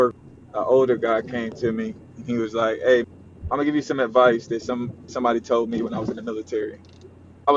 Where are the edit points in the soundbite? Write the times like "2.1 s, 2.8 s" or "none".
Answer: none